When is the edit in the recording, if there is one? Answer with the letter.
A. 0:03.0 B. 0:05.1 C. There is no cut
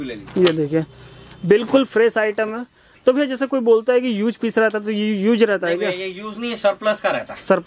C